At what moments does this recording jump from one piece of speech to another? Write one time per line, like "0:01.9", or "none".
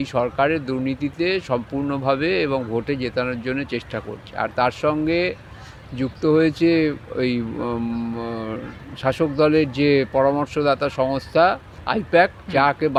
none